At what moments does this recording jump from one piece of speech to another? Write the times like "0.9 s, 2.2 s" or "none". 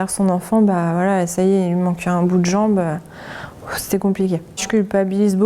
4.5 s